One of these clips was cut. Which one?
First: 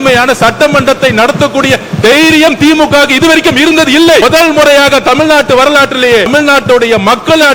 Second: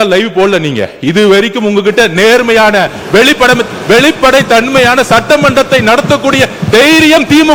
first; 2 cuts; at 4.2 s, 6.3 s

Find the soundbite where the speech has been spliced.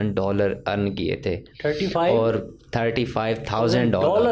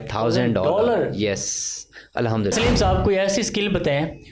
second; 1 cut; at 2.5 s

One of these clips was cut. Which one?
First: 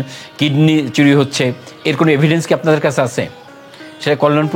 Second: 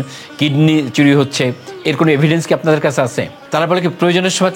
second; 1 cut; at 3.4 s

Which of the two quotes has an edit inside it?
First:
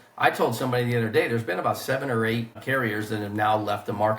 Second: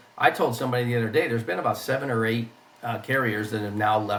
first; 1 cut; at 2.6 s

